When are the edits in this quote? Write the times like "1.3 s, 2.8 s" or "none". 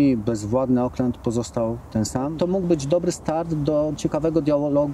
2.3 s